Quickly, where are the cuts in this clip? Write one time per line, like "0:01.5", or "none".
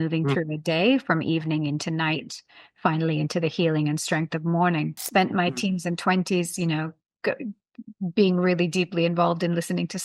0:05.0